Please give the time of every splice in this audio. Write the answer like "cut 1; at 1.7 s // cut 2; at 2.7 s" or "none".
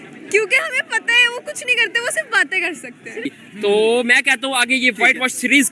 cut 1; at 3.3 s